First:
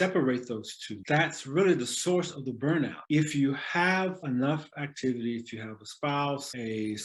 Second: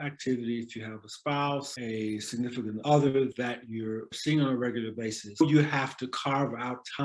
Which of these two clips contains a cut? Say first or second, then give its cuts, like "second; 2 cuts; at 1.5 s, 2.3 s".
second; 1 cut; at 4.1 s